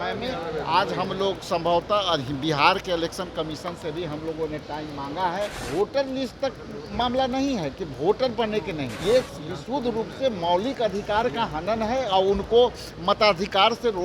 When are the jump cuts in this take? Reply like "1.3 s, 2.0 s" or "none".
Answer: 5.6 s, 8.9 s